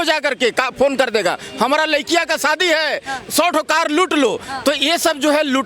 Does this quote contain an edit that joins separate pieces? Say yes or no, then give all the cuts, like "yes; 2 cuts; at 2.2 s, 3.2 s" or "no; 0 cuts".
no; 0 cuts